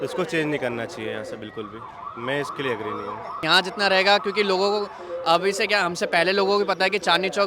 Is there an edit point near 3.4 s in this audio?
yes; 1 cut; at 3.4 s

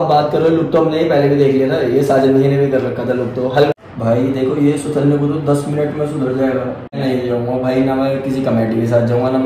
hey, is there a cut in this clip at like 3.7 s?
yes; 2 cuts; at 3.7 s, 7.0 s

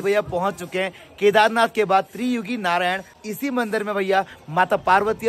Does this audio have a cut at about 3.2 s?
yes; 1 cut; at 3.2 s

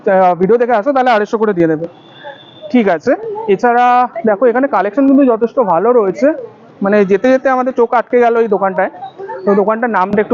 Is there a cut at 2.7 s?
no; 0 cuts

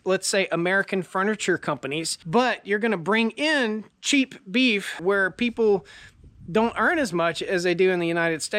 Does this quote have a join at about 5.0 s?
yes; 2 cuts; at 2.1 s, 5.0 s

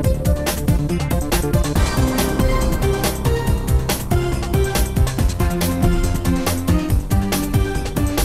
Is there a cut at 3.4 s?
no; 1 cut; at 1.7 s

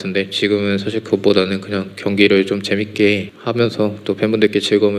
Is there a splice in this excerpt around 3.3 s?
yes; 1 cut; at 3.3 s

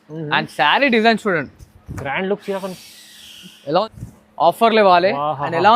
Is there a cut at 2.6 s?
no; 1 cut; at 4.0 s

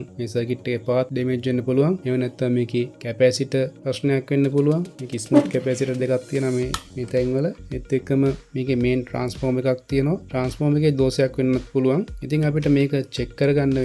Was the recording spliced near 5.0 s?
no; 4 cuts; at 1.1 s, 2.0 s, 3.0 s, 3.8 s

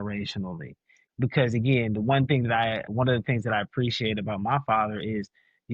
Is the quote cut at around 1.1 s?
yes; 1 cut; at 1.1 s

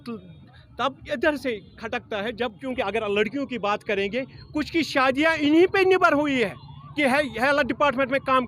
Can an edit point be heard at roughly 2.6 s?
yes; 1 cut; at 2.6 s

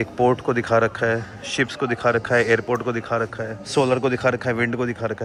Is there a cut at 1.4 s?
no; 0 cuts

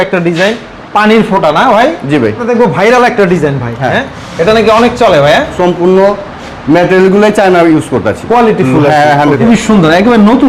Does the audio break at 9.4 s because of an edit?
yes; 3 cuts; at 2.5 s, 5.5 s, 9.4 s

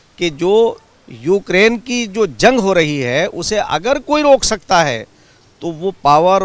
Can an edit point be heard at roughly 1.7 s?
no; 0 cuts

